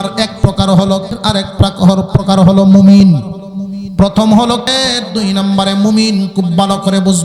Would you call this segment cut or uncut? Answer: cut